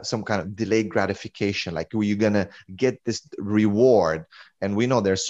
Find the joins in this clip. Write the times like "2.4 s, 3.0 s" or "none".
none